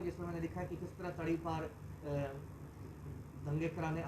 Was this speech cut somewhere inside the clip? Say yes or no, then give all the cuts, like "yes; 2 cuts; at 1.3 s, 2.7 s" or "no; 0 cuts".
no; 0 cuts